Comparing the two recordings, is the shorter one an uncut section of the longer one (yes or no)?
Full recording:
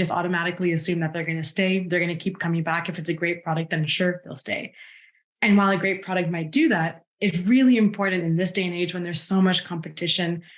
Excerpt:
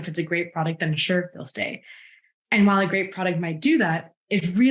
yes